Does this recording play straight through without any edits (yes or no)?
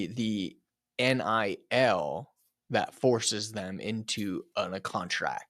yes